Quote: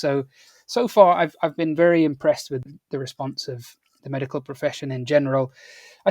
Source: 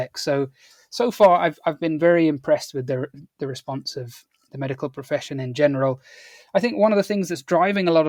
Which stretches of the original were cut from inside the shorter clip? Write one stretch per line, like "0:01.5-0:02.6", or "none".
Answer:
0:02.8-0:03.1